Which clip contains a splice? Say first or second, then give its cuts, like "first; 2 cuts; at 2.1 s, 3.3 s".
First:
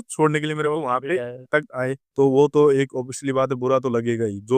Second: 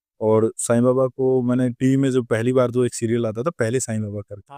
first; 1 cut; at 2.0 s